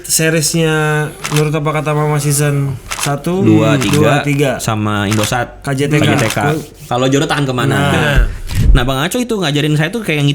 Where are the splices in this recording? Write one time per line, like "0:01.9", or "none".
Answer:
0:06.7
0:08.4